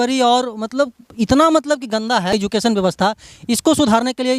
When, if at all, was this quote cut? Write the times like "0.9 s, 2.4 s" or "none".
2.3 s